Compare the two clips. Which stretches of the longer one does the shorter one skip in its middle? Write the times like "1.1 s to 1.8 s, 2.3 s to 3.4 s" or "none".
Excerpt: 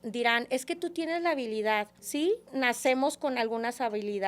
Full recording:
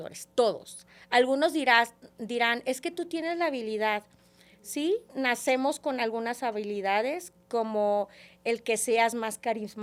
4.1 s to 4.6 s